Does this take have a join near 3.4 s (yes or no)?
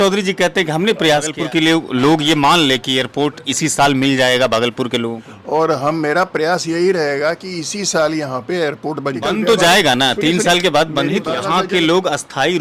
no